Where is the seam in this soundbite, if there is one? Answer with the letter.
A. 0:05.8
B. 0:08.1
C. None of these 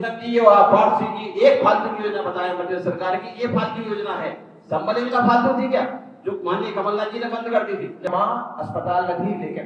B